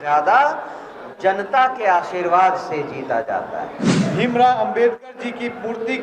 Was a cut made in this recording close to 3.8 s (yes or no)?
yes